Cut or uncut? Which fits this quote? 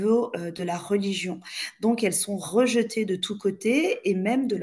uncut